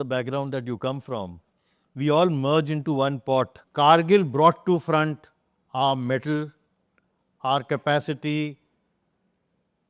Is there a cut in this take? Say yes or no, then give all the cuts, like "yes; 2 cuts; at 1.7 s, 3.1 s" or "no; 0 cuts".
yes; 1 cut; at 3.6 s